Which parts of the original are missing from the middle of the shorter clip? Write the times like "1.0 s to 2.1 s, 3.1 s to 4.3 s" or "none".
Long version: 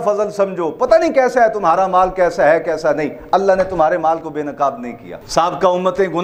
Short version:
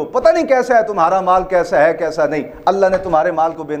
none